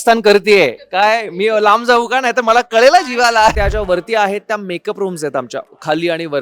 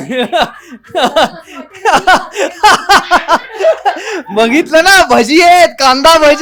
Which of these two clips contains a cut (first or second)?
first